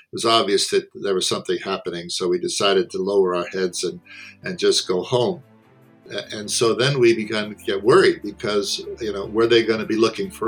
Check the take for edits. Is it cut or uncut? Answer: cut